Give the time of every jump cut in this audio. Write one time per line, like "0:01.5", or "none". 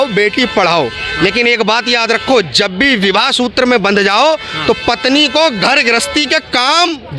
none